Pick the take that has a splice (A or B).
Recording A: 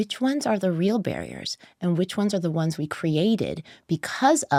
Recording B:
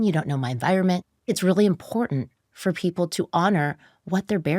B